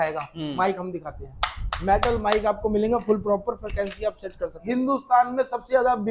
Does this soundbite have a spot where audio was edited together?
yes; 1 cut; at 4.6 s

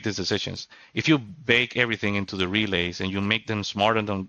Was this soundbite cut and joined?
no; 0 cuts

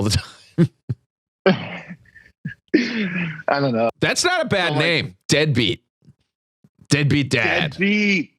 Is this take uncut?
no; 1 cut; at 3.9 s

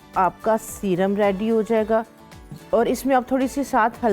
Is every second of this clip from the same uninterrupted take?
yes; 0 cuts

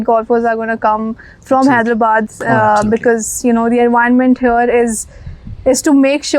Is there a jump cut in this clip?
no; 0 cuts

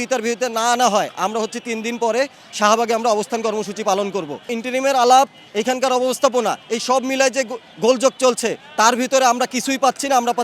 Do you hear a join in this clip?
yes; 1 cut; at 4.5 s

